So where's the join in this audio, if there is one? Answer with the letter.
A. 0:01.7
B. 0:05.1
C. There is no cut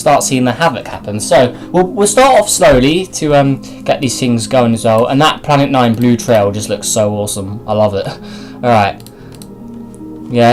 C